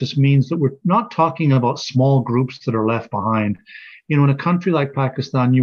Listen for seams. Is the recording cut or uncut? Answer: uncut